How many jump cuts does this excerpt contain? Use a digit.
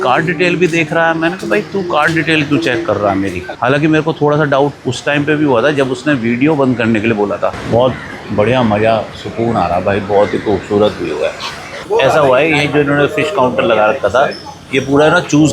3